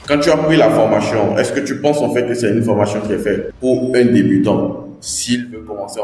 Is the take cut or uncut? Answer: uncut